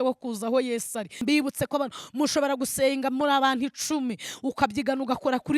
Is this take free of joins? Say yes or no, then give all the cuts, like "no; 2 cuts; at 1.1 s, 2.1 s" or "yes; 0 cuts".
no; 1 cut; at 1.2 s